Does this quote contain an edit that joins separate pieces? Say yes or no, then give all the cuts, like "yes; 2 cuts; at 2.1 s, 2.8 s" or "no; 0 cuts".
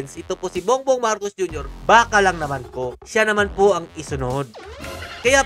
no; 0 cuts